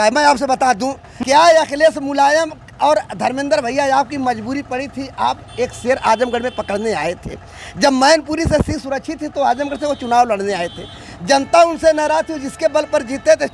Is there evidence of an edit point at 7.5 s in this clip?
no; 1 cut; at 1.1 s

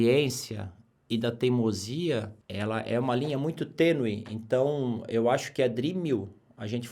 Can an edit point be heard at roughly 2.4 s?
yes; 1 cut; at 2.4 s

